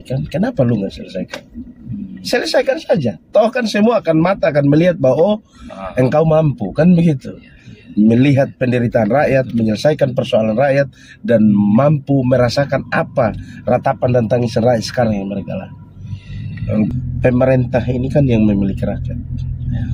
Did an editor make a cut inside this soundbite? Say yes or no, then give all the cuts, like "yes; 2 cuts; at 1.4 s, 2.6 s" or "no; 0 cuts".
yes; 1 cut; at 17.0 s